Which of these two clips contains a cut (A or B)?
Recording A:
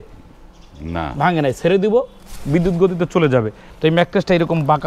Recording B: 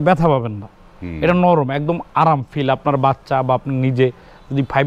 A